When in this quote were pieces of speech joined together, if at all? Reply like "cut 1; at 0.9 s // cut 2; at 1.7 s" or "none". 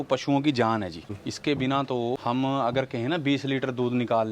cut 1; at 1.2 s // cut 2; at 2.2 s